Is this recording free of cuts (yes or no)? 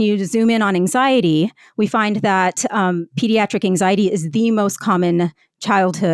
yes